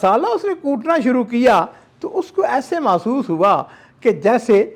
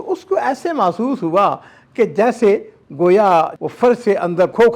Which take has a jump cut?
second; 1 cut; at 3.6 s

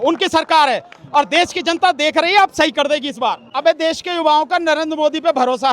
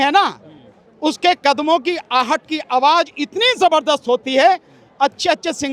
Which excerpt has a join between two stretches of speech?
first; 1 cut; at 3.5 s

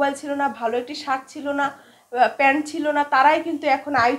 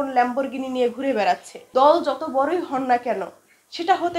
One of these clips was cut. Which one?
second; 1 cut; at 1.7 s

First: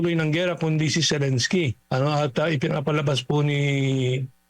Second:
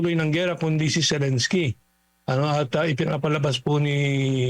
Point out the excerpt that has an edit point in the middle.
first; 1 cut; at 1.8 s

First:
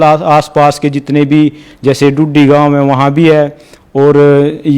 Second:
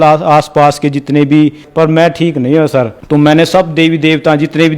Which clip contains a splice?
second; 2 cuts; at 1.6 s, 3.0 s

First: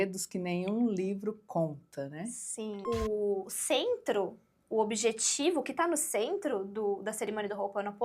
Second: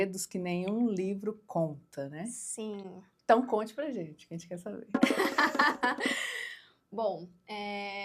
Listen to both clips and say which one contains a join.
first; 1 cut; at 2.8 s

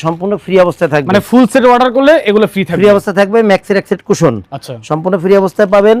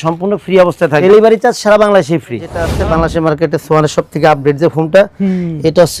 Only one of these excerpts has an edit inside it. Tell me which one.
second; 2 cuts; at 1.0 s, 2.7 s

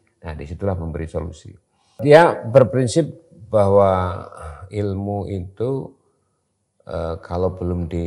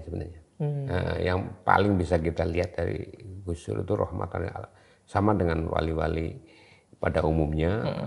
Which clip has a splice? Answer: first; 1 cut; at 2.0 s

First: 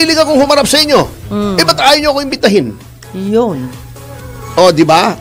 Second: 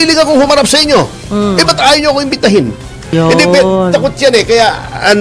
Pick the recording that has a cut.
second; 1 cut; at 3.0 s

